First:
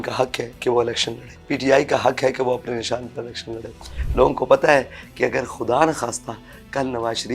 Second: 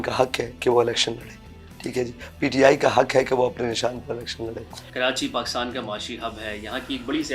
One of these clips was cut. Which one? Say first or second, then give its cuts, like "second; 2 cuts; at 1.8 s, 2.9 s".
first; 2 cuts; at 1.3 s, 3.9 s